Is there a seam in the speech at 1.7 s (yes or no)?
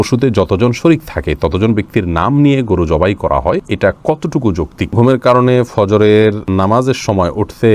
no